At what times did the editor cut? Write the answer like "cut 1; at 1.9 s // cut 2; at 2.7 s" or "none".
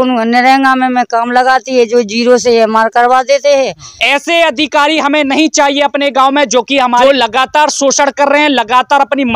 cut 1; at 3.9 s